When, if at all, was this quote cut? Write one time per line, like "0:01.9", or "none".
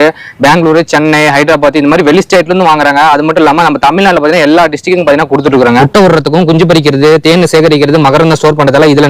0:05.9